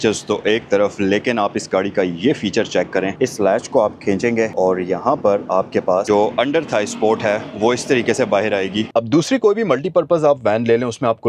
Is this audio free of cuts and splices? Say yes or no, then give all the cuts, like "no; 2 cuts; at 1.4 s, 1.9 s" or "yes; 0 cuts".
no; 3 cuts; at 3.1 s, 6.0 s, 8.9 s